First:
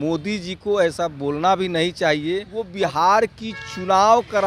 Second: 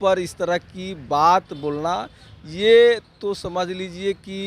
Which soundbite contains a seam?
first; 1 cut; at 2.6 s

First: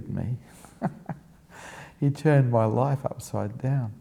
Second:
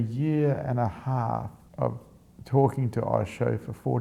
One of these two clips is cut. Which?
second; 1 cut; at 1.6 s

